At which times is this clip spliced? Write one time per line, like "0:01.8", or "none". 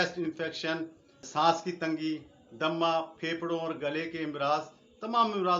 0:01.2